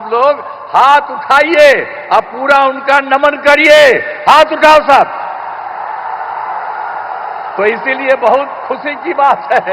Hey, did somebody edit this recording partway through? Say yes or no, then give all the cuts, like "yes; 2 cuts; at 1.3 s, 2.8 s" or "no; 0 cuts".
no; 0 cuts